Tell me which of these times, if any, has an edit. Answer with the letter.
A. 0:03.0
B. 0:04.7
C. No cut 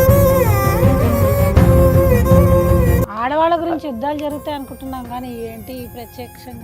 A